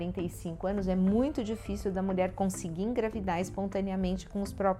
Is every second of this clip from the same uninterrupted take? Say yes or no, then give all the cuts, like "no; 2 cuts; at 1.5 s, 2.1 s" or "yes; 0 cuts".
yes; 0 cuts